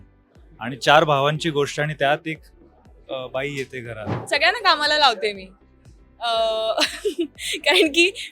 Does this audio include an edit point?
yes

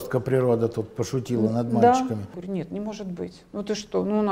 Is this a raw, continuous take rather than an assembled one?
no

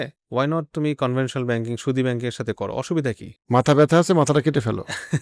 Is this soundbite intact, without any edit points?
yes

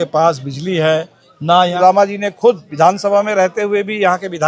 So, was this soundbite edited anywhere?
yes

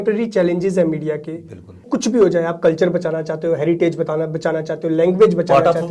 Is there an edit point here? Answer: yes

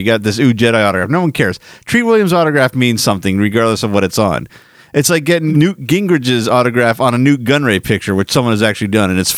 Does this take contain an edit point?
yes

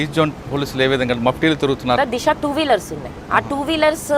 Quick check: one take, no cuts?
no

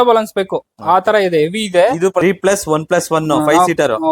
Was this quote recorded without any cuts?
no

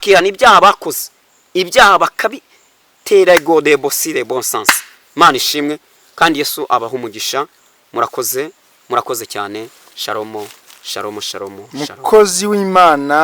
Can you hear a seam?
no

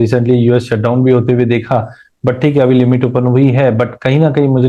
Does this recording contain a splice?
no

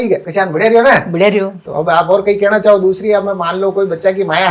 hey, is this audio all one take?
no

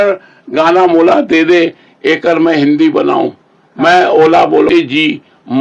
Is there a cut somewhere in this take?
yes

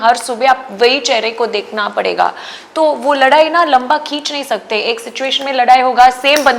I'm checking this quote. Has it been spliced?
no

